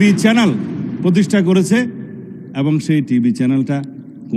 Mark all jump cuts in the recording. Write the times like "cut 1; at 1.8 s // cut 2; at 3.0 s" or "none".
none